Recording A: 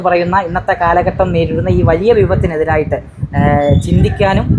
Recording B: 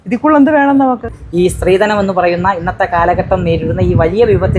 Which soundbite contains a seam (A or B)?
B